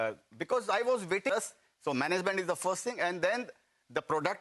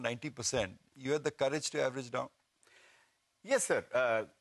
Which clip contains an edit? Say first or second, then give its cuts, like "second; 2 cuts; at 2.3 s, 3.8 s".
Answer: first; 1 cut; at 1.3 s